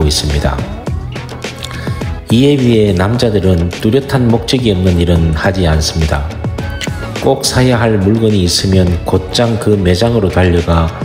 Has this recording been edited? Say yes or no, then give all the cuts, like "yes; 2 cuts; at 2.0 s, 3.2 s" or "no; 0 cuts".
no; 0 cuts